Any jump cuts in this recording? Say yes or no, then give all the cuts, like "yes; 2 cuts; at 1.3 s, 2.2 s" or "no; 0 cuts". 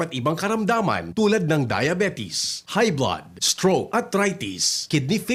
no; 0 cuts